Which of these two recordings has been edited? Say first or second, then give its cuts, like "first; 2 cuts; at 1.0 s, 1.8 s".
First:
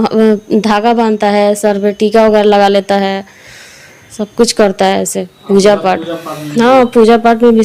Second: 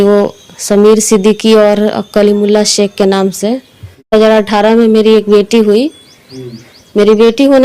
second; 1 cut; at 4.1 s